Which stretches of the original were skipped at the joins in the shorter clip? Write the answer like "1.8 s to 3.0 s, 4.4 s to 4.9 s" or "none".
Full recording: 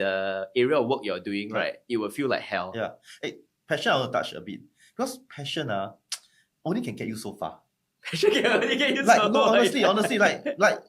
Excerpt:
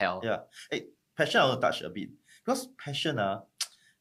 none